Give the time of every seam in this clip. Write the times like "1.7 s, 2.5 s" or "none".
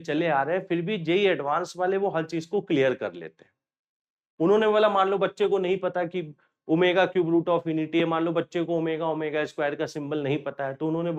none